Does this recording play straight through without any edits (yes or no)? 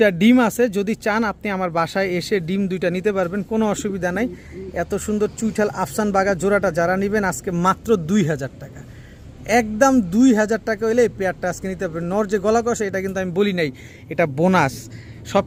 yes